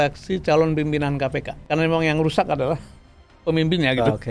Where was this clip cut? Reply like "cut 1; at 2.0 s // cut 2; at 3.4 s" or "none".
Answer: cut 1; at 1.5 s